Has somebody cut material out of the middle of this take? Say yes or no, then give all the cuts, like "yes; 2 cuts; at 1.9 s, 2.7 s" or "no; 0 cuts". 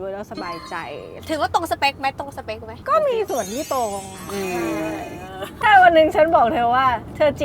yes; 3 cuts; at 1.1 s, 2.7 s, 5.4 s